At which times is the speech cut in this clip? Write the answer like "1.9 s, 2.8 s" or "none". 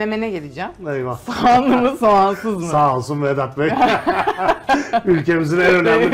none